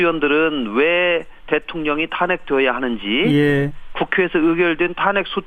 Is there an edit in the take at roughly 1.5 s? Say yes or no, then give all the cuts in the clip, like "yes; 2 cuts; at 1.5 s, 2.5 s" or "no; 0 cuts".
yes; 1 cut; at 1.5 s